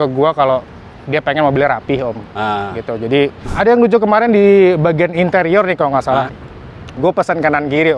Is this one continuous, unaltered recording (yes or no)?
no